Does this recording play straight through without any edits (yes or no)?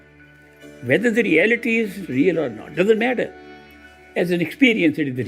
no